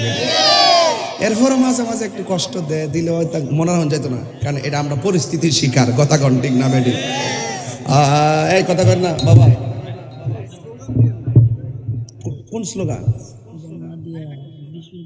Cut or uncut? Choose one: uncut